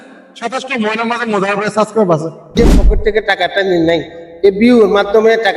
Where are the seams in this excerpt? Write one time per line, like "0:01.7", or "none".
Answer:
0:02.6